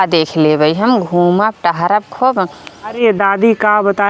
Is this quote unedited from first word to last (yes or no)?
no